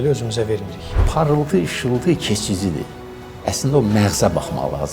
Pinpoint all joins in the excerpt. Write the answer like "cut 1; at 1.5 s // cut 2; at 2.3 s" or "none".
cut 1; at 1.0 s